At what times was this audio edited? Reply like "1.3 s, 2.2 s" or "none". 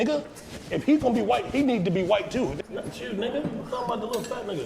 2.6 s